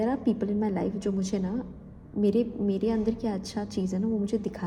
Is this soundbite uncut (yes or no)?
yes